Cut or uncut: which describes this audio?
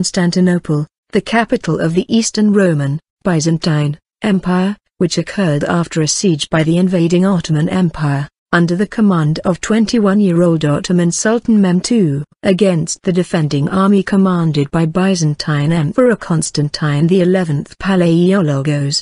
cut